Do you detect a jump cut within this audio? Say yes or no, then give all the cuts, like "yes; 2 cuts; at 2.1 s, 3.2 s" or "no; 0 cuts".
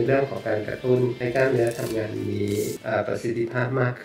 yes; 2 cuts; at 1.2 s, 2.8 s